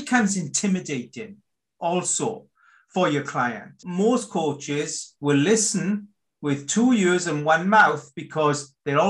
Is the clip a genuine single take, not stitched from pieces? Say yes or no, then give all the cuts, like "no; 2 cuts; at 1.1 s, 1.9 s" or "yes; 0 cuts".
no; 1 cut; at 3.8 s